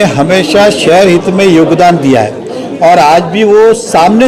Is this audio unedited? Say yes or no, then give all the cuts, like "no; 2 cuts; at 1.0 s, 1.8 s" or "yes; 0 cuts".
yes; 0 cuts